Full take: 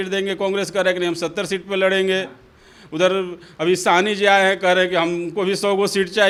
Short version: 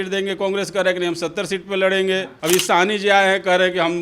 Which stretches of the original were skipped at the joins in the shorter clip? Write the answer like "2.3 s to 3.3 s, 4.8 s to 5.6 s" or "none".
2.3 s to 3.5 s